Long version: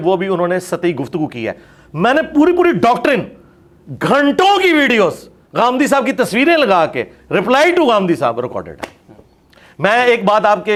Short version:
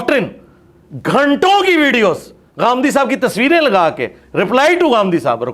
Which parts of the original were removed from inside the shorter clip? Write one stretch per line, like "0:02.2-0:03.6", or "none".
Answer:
none